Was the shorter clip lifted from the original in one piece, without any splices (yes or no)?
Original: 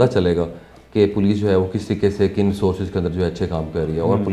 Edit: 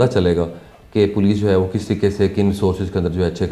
yes